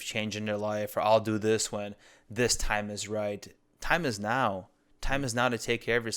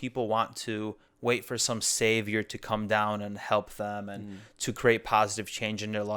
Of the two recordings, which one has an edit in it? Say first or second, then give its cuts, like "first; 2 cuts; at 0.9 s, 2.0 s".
second; 1 cut; at 1.0 s